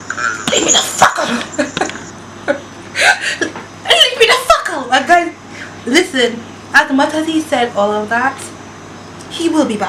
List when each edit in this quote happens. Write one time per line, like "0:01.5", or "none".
none